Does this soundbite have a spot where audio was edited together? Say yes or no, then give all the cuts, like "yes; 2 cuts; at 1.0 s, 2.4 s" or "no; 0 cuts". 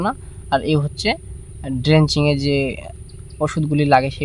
no; 0 cuts